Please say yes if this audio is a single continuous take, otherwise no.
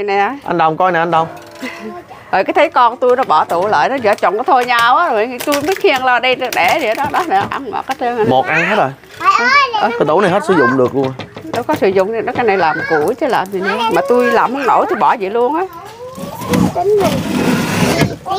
yes